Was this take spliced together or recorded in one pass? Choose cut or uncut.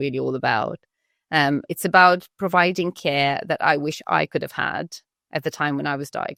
uncut